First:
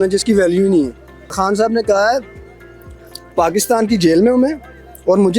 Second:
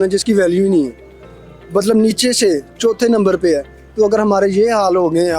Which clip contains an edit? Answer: first; 1 cut; at 1.4 s

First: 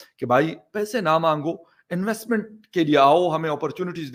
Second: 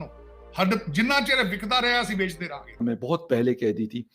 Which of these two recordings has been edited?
second; 1 cut; at 2.8 s

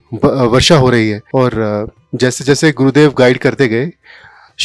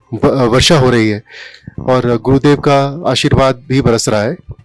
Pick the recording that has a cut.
first; 1 cut; at 1.2 s

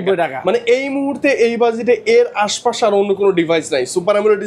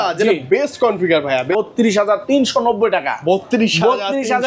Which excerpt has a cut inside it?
second; 1 cut; at 1.5 s

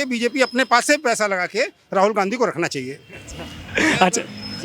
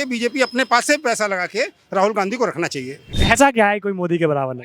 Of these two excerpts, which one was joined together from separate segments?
second; 1 cut; at 3.1 s

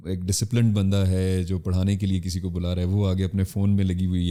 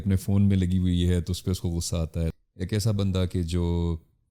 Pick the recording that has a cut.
second; 1 cut; at 2.3 s

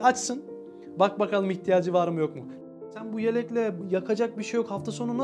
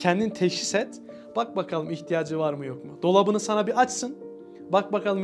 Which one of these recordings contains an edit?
first; 2 cuts; at 2.6 s, 3.8 s

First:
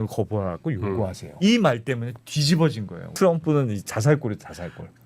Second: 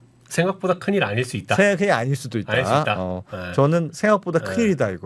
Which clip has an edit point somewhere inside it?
first; 2 cuts; at 1.2 s, 3.1 s

